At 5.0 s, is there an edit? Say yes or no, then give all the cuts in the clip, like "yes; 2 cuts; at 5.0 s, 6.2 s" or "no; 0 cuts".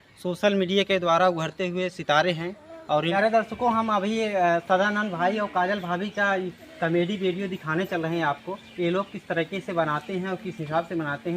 no; 1 cut; at 3.1 s